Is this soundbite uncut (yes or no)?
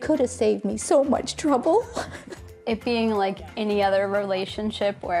no